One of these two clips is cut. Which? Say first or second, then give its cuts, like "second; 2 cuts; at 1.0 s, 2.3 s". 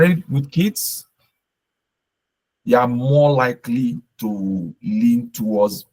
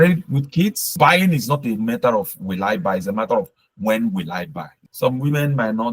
second; 2 cuts; at 0.9 s, 4.7 s